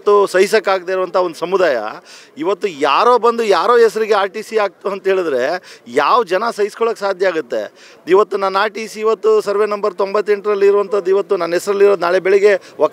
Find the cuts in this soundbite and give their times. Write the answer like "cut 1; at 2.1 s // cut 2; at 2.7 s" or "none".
none